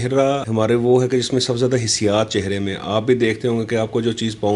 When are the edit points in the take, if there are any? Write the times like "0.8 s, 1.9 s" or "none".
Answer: none